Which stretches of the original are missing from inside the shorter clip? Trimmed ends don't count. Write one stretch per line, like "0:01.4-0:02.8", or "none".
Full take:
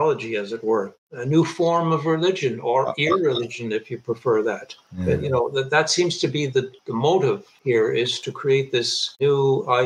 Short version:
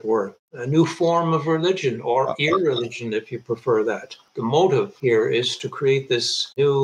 0:04.9-0:06.8
0:07.4-0:07.6